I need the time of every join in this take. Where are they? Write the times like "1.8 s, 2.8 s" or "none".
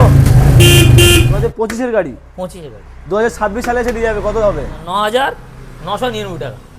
1.3 s, 4.8 s